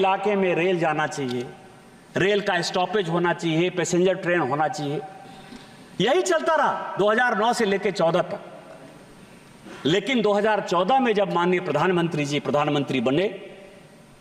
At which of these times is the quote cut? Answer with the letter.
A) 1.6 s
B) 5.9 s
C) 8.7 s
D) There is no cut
D